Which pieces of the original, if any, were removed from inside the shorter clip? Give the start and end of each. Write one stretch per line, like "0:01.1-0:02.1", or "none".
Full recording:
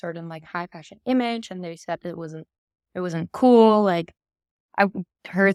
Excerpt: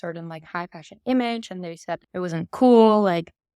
0:02.0-0:02.9